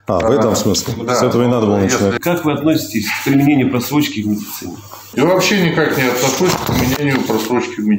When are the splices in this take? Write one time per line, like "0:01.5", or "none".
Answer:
0:02.2
0:05.0